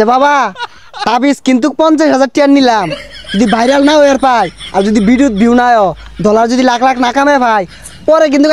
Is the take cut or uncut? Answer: uncut